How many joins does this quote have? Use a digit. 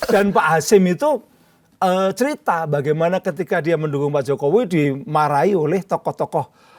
0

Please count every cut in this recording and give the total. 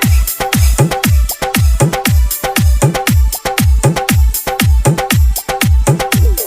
1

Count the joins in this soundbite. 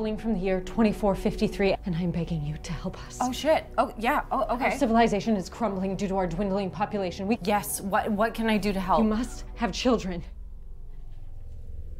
2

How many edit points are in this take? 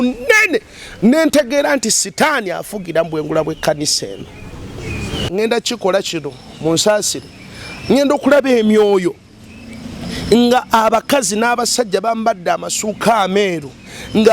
1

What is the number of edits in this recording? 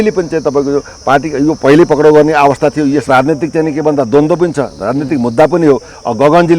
1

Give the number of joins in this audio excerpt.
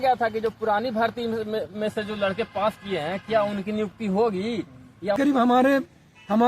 1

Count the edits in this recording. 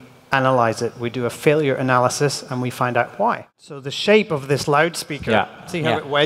1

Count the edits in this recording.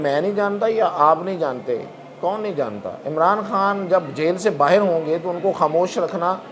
0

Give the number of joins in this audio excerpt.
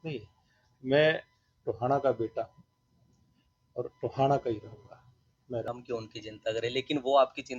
1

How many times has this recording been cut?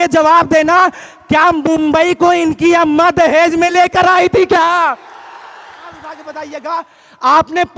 1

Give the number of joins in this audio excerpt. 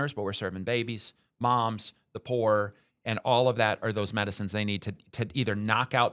0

